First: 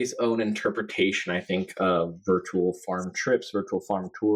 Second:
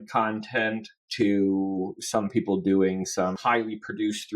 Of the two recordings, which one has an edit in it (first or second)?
second